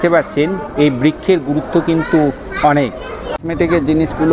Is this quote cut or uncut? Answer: cut